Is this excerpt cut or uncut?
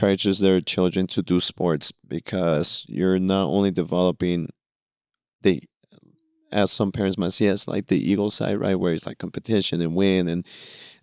uncut